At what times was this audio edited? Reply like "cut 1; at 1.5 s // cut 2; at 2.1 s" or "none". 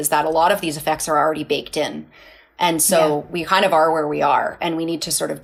none